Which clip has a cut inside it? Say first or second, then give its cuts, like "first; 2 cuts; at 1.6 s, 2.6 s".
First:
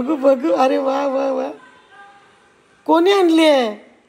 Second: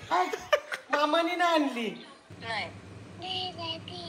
second; 1 cut; at 2.2 s